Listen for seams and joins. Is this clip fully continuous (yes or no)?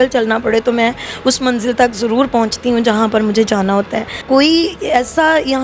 no